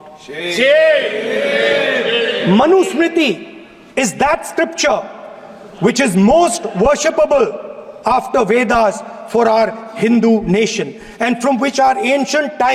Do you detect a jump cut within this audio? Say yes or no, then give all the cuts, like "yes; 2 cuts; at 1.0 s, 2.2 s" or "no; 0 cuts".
no; 0 cuts